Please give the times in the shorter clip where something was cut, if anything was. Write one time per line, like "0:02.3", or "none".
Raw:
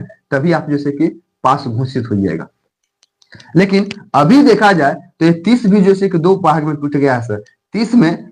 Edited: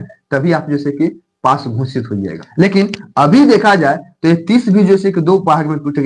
0:02.4